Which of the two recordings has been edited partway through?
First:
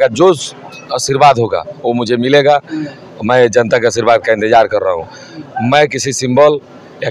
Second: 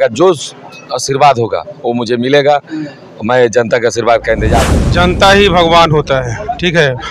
second; 1 cut; at 4.6 s

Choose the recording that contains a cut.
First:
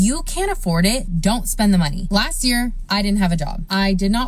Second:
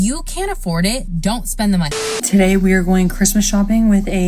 second; 1 cut; at 2.0 s

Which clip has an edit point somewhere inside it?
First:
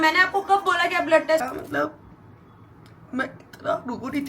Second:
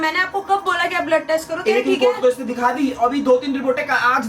first; 1 cut; at 1.4 s

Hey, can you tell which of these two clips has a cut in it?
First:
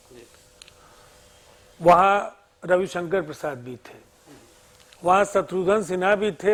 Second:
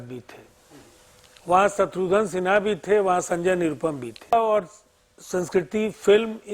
second; 1 cut; at 4.3 s

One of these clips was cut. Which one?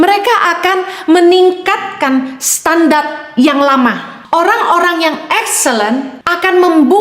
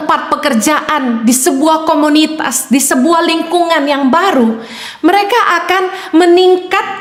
first; 2 cuts; at 4.1 s, 6.2 s

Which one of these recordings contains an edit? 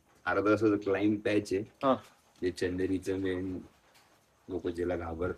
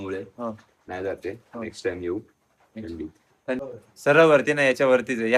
second; 1 cut; at 3.6 s

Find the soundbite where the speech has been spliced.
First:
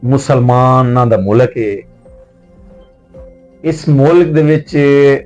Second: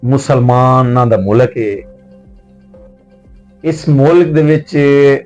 second; 2 cuts; at 1.8 s, 3.4 s

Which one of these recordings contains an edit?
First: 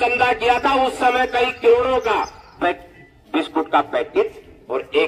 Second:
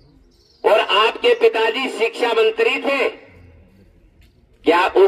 first; 1 cut; at 2.5 s

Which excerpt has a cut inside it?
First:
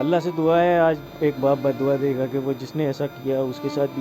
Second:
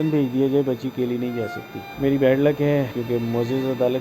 second; 2 cuts; at 1.9 s, 3.0 s

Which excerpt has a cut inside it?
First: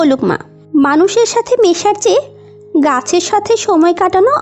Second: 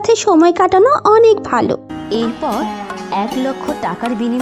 second; 1 cut; at 1.9 s

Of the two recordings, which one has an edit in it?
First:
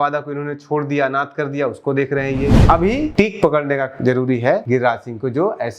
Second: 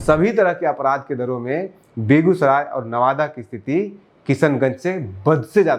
first; 2 cuts; at 2.7 s, 4.6 s

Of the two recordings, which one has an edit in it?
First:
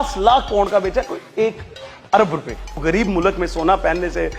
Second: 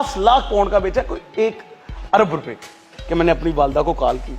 first; 1 cut; at 2.8 s

